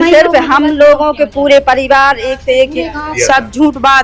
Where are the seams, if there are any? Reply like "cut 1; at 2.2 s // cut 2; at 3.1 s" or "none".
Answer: cut 1; at 3.0 s